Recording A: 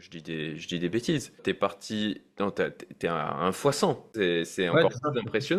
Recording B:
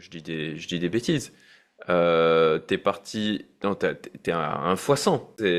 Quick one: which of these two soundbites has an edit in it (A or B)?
A